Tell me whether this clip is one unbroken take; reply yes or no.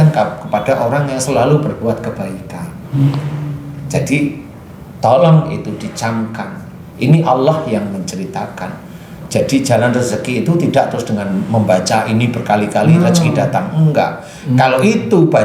yes